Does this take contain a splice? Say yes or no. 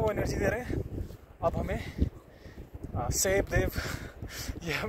no